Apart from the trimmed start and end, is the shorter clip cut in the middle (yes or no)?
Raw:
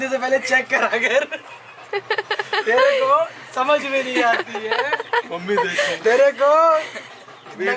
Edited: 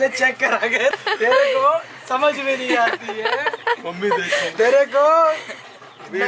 yes